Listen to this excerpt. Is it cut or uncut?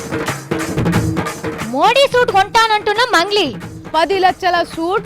cut